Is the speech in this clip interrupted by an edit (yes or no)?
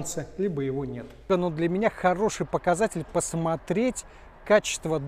yes